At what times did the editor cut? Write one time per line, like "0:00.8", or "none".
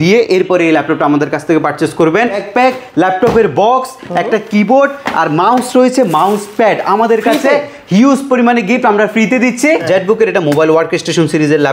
0:02.4
0:09.8

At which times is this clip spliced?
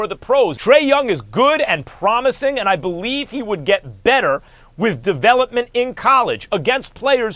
none

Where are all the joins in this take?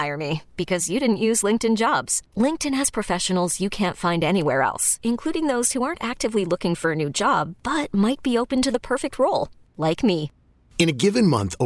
none

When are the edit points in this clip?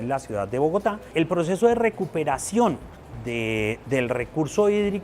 0:01.1

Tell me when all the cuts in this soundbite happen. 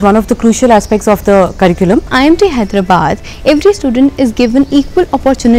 0:02.1

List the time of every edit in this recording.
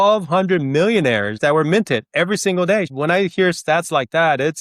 0:01.3
0:02.9

